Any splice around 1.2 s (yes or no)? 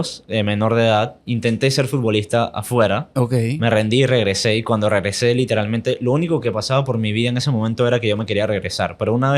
yes